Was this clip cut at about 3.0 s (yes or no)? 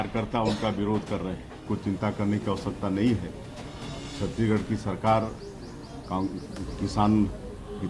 no